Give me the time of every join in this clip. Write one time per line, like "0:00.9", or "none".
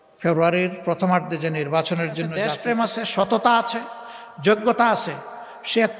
0:02.4